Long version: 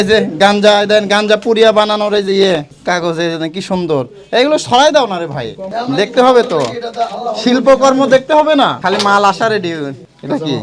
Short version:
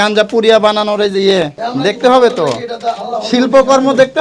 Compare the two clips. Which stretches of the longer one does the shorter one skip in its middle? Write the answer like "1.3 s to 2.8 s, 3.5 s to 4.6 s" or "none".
2.7 s to 5.7 s